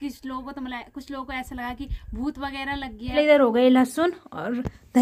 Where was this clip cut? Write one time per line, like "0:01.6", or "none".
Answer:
0:03.1